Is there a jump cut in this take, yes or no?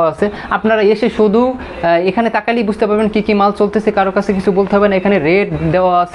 no